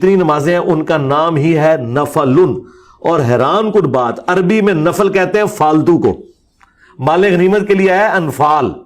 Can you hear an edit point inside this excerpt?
yes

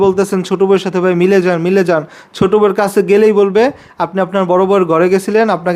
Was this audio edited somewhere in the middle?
no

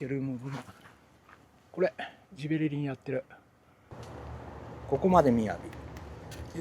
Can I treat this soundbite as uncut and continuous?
no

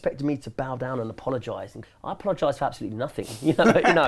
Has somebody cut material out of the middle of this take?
yes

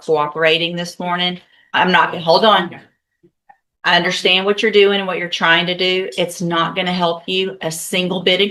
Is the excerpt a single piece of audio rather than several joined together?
yes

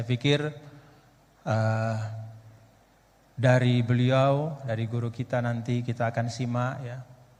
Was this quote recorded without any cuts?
yes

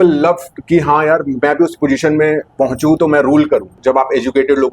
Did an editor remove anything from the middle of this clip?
yes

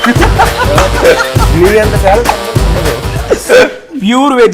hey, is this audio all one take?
yes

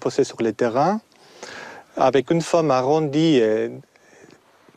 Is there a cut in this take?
no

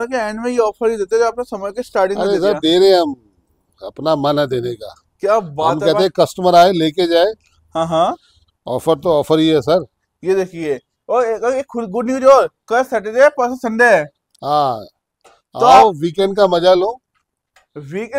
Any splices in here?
no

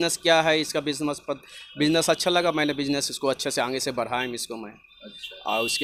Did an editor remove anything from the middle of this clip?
no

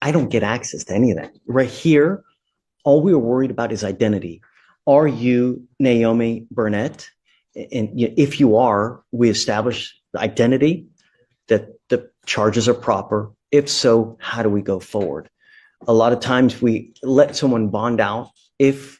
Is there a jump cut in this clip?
no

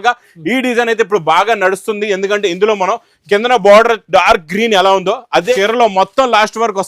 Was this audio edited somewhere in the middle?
yes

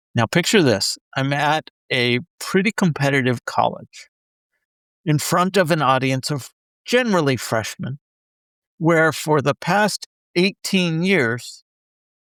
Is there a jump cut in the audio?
no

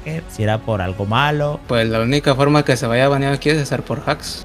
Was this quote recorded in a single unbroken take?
yes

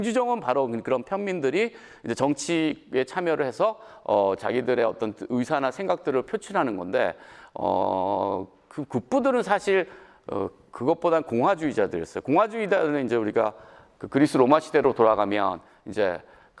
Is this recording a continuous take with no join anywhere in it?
yes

